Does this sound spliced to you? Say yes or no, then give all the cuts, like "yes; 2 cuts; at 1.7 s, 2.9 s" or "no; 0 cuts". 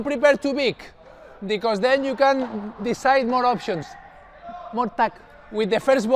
no; 0 cuts